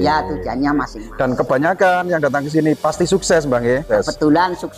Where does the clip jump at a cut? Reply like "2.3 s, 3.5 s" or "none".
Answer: 3.8 s